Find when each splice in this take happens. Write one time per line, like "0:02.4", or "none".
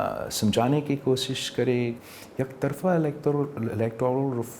0:02.0